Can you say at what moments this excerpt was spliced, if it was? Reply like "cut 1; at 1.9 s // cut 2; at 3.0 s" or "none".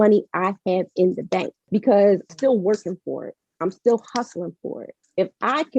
cut 1; at 1.6 s // cut 2; at 2.3 s